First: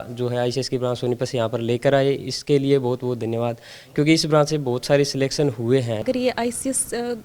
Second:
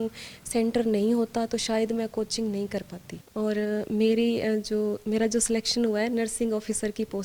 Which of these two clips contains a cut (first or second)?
first